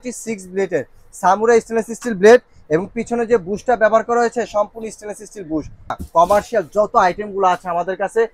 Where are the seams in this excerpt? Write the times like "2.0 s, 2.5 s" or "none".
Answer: 6.0 s